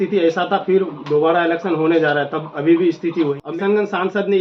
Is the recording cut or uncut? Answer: cut